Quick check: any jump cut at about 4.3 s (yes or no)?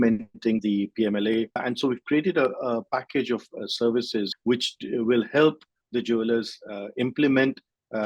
yes